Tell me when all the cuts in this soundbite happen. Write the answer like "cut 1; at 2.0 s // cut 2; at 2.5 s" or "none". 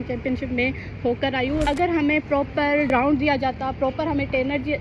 cut 1; at 1.7 s // cut 2; at 2.9 s